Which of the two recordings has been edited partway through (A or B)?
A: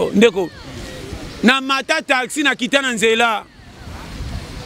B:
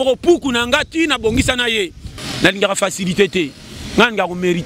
B